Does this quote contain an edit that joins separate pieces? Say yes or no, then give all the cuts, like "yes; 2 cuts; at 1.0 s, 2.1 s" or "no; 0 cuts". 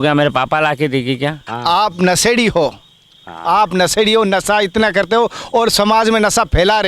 yes; 1 cut; at 1.5 s